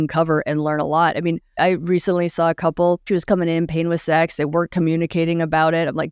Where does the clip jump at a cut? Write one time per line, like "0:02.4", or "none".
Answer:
0:01.5
0:03.0